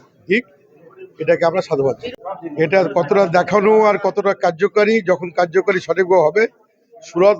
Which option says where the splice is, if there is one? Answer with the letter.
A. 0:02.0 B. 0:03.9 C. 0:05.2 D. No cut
A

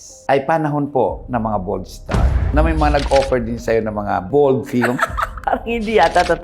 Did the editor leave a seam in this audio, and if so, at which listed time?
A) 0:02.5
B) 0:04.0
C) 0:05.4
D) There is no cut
A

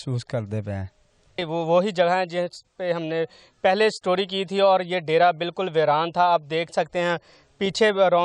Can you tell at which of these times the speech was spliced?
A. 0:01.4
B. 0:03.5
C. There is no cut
A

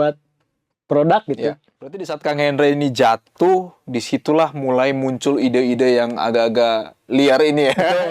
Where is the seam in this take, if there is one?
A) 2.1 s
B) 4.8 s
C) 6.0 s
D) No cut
A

